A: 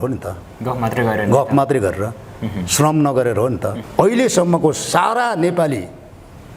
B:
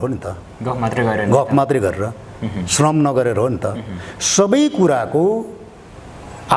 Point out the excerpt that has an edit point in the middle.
A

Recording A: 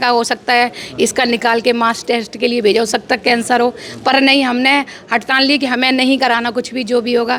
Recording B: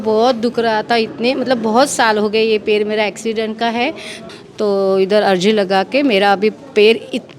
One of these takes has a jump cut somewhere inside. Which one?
B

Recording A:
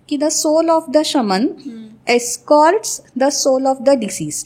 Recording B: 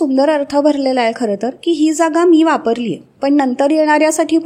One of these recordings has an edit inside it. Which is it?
B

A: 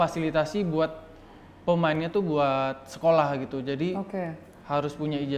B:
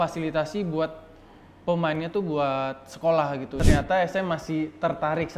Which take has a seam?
B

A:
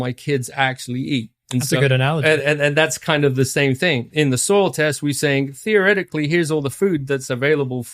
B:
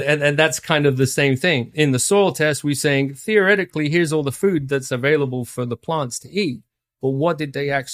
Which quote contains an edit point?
A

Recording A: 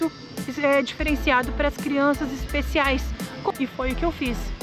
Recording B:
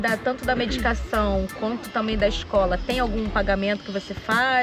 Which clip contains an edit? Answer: A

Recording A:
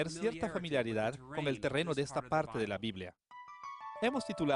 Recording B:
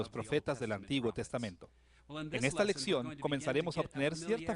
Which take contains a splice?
B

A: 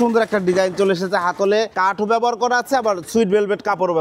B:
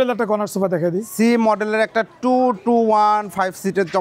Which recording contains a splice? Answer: A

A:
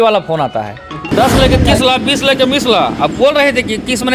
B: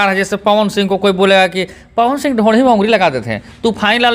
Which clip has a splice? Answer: A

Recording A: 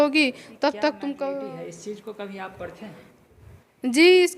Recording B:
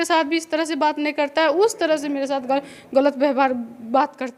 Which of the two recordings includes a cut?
A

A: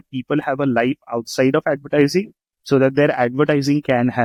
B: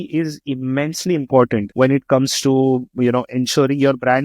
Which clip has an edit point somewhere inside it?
B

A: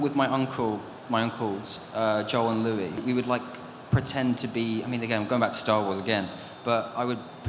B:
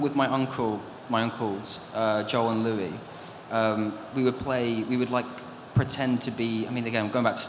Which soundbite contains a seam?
A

